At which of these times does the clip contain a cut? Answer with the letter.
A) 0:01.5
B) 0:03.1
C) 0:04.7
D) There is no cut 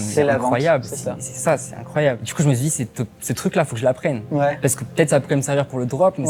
D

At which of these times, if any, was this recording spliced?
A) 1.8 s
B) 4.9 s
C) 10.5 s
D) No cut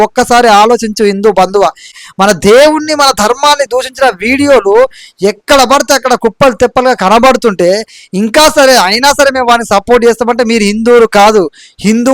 A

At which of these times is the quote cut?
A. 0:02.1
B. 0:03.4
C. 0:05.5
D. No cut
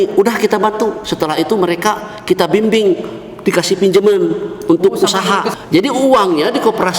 C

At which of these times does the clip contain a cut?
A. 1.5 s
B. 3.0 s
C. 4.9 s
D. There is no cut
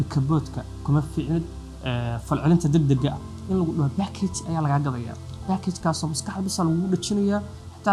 D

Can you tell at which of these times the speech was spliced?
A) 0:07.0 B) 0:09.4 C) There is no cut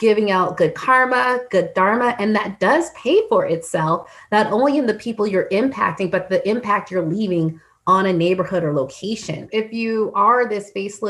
B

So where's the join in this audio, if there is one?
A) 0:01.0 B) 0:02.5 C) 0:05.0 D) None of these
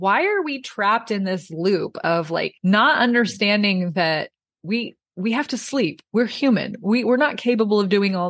B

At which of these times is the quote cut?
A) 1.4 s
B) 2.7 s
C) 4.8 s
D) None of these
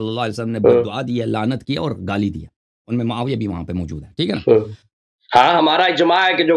C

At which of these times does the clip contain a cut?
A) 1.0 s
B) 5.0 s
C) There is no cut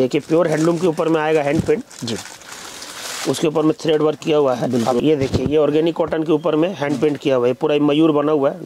B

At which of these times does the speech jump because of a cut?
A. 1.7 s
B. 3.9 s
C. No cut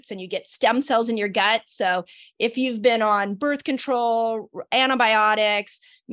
C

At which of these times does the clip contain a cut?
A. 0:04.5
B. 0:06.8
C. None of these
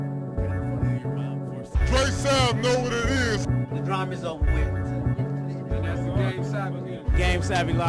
C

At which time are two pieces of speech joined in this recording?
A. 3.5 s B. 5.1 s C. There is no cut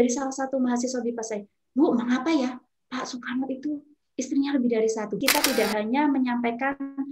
B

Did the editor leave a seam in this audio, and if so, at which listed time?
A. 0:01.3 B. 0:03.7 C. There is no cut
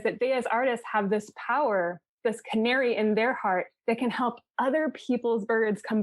B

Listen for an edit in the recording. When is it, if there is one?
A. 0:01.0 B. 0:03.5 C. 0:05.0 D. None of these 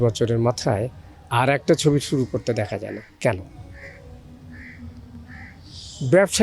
D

